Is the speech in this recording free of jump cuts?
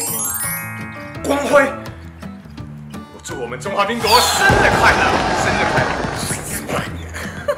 yes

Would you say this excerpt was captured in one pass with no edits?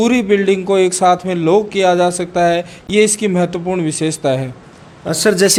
yes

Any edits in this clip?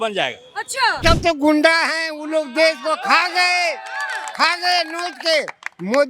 yes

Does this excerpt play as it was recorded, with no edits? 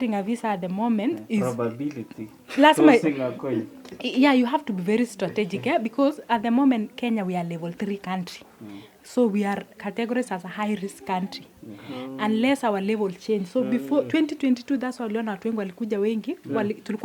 yes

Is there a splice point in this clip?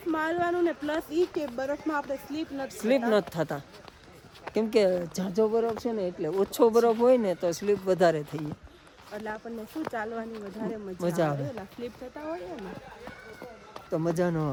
no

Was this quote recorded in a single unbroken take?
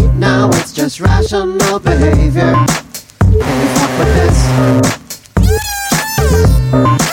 no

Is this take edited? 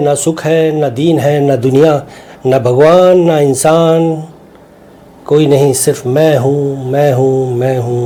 no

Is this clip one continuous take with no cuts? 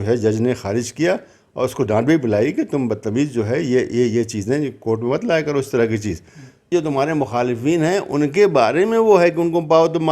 no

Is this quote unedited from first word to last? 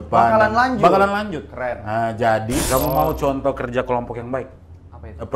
no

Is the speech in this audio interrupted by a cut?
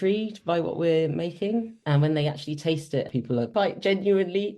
yes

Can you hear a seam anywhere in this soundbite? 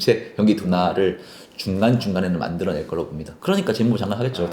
yes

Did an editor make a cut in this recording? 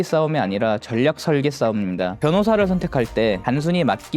yes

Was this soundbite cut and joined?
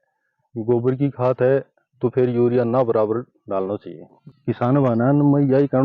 yes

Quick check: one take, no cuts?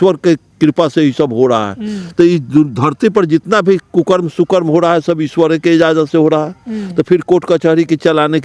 yes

